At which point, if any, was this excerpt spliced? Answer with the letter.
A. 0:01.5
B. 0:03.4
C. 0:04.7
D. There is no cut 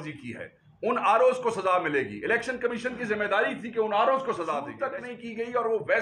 C